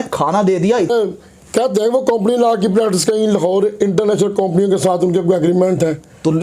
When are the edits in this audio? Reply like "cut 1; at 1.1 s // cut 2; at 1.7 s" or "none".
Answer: cut 1; at 0.9 s